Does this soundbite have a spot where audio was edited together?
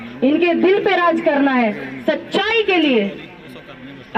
no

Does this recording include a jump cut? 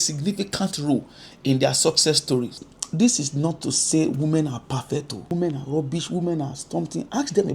yes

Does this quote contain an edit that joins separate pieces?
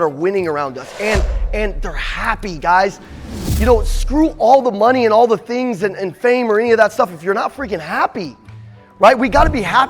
no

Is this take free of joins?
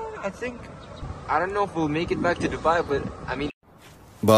no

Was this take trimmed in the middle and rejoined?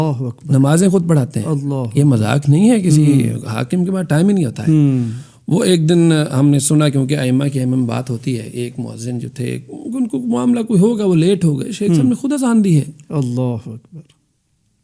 no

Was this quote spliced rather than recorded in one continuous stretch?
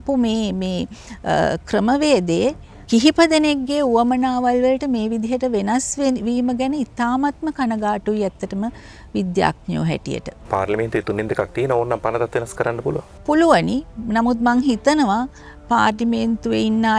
no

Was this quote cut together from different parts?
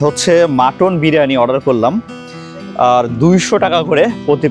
no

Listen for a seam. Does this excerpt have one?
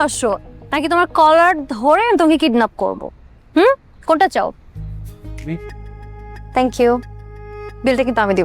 yes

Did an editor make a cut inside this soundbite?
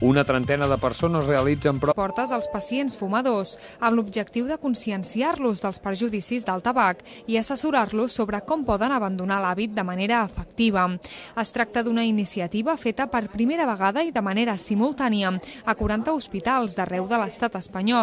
no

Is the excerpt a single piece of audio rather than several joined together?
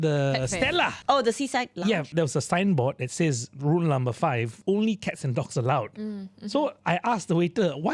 no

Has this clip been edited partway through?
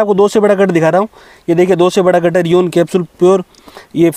no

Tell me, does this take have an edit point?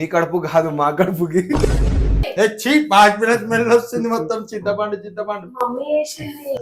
yes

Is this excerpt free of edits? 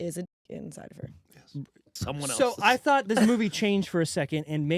no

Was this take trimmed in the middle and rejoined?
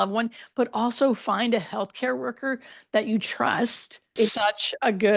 yes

